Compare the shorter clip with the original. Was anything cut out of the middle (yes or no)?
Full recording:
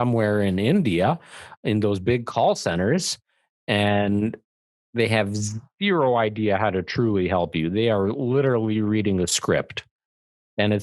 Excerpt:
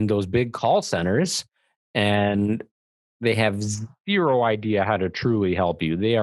no